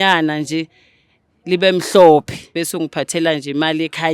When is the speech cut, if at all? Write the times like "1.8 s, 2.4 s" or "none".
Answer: 2.6 s